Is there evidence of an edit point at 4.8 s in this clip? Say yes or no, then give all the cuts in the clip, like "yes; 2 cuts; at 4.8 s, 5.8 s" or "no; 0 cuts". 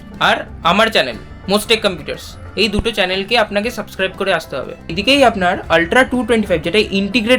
yes; 1 cut; at 4.8 s